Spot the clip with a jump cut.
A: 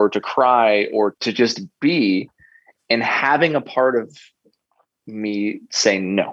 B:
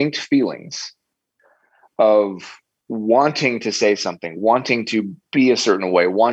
A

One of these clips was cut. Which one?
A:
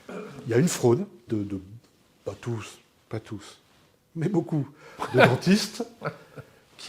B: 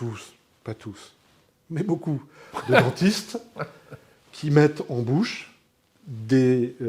A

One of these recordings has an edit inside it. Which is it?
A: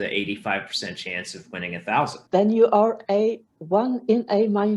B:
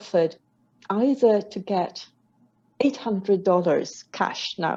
A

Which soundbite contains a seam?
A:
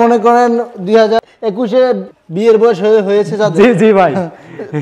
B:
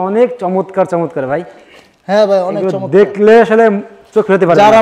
A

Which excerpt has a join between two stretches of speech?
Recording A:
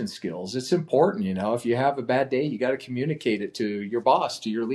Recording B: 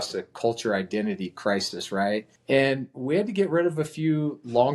B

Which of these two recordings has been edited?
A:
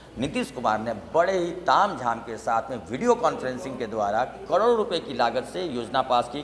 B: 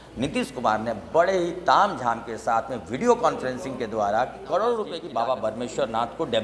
B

